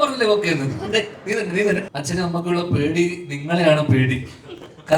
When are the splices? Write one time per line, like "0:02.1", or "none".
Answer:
0:01.9